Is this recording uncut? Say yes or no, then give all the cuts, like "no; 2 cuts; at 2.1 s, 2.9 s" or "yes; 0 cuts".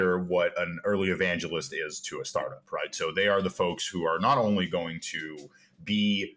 yes; 0 cuts